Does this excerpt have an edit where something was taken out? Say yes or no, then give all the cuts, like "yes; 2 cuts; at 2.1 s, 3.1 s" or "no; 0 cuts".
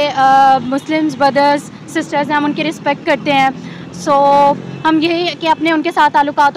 no; 0 cuts